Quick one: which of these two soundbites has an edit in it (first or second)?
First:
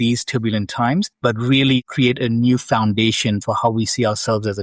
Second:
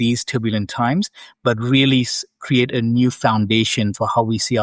first